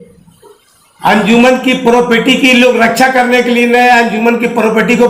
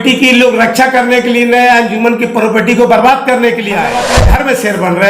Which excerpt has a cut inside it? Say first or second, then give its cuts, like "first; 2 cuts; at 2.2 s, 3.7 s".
second; 1 cut; at 4.1 s